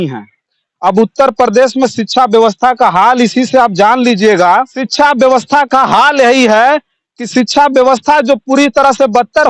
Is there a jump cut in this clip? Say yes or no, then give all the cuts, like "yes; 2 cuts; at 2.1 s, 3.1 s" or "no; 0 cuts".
yes; 1 cut; at 4.8 s